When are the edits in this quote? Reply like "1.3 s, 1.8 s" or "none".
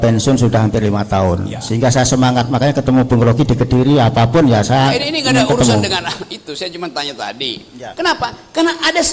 7.8 s